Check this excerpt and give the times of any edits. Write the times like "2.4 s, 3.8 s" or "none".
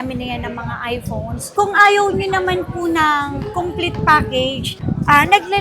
1.4 s